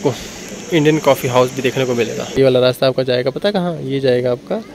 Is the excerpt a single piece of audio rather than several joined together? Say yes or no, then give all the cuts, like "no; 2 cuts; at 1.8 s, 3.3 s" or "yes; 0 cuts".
no; 1 cut; at 2.4 s